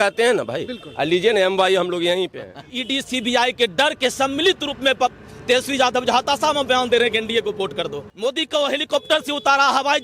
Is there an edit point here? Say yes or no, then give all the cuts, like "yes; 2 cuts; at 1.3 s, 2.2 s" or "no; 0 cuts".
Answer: yes; 2 cuts; at 2.8 s, 8.0 s